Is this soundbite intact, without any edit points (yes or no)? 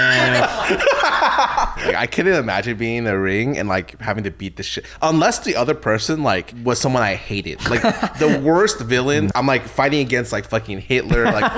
no